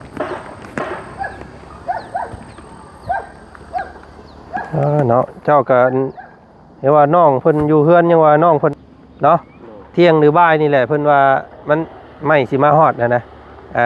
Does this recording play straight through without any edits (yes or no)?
no